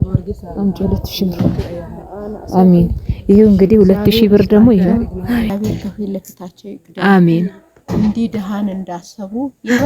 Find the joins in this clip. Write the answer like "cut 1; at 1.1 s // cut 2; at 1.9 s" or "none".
cut 1; at 5.5 s